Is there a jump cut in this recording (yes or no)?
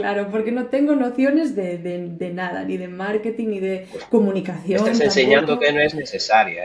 no